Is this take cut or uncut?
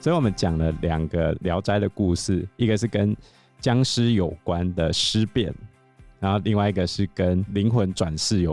uncut